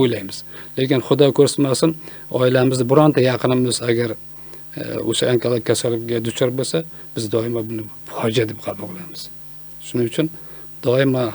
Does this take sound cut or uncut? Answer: uncut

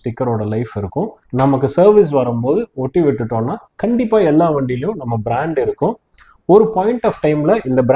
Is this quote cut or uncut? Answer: uncut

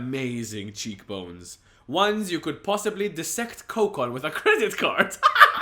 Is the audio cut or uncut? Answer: uncut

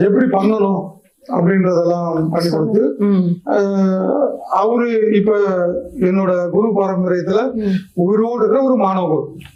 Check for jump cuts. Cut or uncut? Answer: uncut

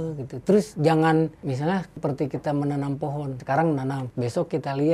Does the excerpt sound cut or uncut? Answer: cut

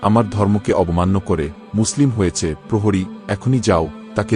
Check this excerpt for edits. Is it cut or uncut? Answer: uncut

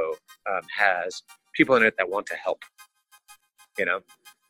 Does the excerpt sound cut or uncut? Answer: cut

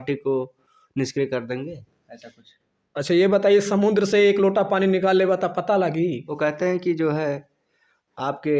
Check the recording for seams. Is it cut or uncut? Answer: cut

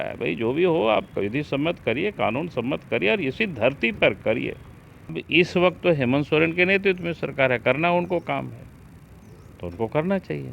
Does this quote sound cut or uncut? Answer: cut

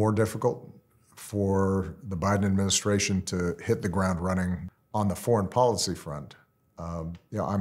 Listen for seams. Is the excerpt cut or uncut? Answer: cut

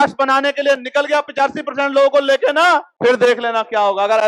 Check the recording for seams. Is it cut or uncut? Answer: cut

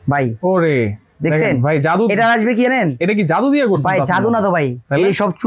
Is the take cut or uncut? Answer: uncut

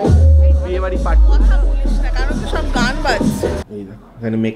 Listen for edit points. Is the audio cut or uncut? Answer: cut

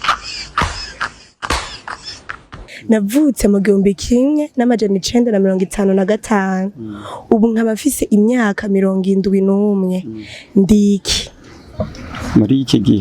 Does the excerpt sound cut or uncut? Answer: cut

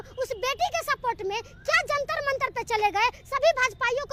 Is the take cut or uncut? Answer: uncut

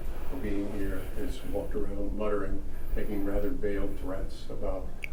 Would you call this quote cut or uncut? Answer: uncut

